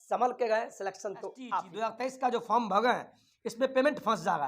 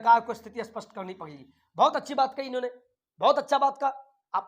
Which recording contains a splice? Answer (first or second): first